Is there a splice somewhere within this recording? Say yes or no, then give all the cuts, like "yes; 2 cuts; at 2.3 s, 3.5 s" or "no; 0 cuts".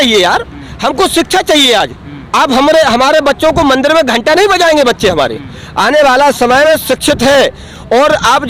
no; 0 cuts